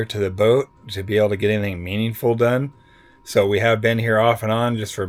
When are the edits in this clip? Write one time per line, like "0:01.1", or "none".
none